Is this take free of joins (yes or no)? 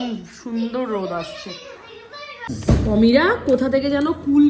no